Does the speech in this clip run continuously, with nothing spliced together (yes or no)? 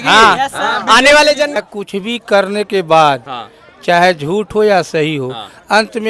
no